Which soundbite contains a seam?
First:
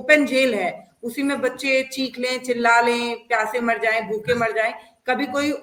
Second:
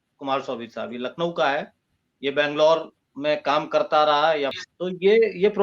second; 1 cut; at 4.6 s

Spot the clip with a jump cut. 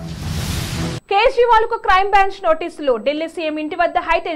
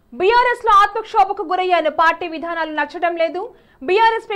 first; 1 cut; at 1.0 s

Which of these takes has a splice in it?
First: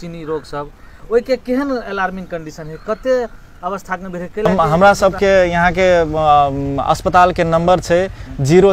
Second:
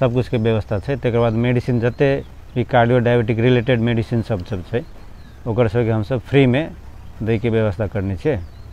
first; 1 cut; at 4.8 s

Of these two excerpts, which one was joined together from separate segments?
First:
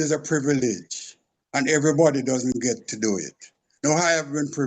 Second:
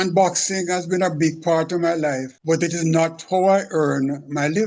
second; 1 cut; at 2.3 s

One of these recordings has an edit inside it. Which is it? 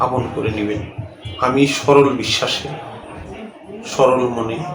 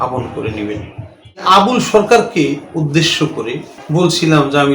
second; 2 cuts; at 1.4 s, 3.7 s

